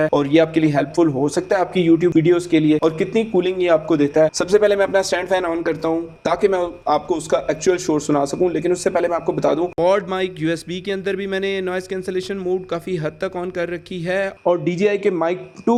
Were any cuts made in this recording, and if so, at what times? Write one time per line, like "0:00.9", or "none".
none